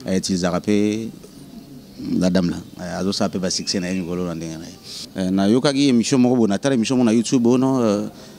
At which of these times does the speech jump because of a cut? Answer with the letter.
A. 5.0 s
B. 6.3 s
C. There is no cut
A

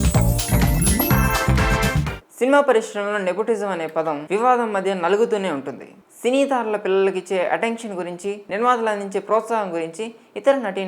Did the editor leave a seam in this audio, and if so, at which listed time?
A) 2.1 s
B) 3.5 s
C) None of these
A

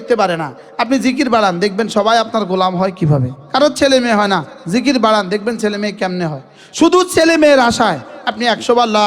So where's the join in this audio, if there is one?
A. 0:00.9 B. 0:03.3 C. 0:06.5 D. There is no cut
B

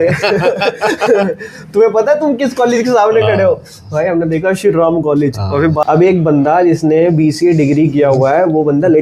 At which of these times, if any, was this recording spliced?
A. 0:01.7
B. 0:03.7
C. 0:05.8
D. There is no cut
C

